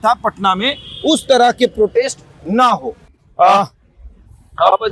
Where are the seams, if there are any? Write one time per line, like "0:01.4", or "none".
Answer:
none